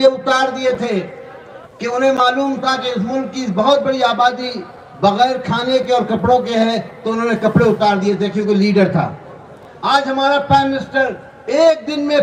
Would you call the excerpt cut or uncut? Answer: uncut